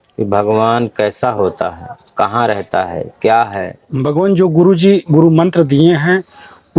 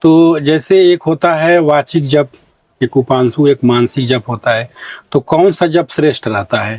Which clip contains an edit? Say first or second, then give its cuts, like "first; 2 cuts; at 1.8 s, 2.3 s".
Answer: first; 1 cut; at 3.8 s